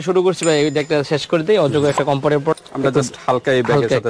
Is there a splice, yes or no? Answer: yes